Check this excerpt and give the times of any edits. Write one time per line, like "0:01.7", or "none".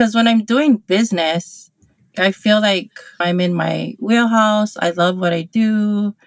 0:02.1
0:03.2